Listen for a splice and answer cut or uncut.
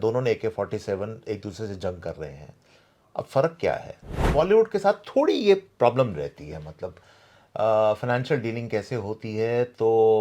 cut